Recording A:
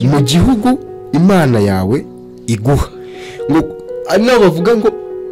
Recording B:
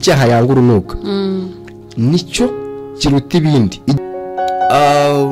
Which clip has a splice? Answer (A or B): B